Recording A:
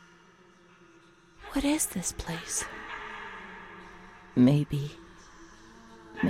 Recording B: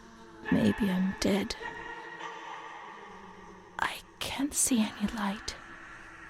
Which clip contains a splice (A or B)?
B